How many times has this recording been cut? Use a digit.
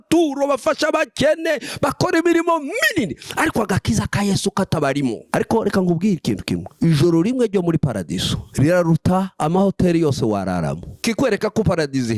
4